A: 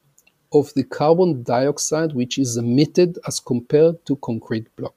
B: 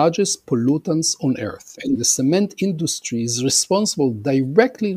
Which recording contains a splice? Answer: B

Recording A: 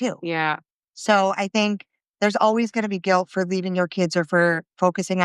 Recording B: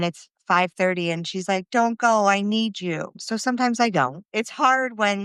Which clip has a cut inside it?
B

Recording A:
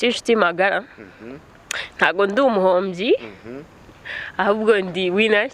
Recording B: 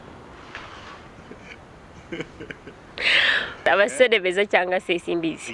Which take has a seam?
B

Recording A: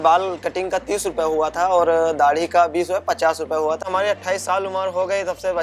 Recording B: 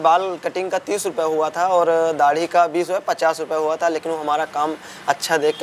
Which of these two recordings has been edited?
A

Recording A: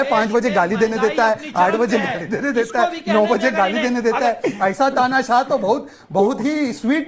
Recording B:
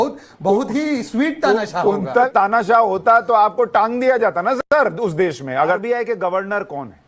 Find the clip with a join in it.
B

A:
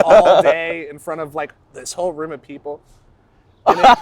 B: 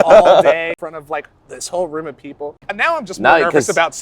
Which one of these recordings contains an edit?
B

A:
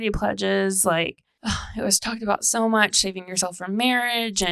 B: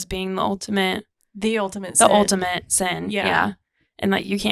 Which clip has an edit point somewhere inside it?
A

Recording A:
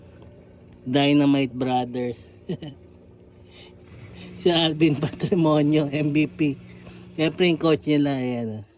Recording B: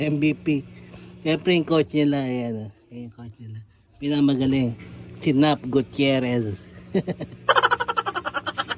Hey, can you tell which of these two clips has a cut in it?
B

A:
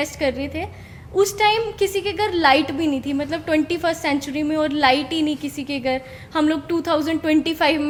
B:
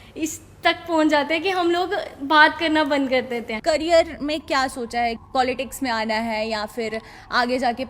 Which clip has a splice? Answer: B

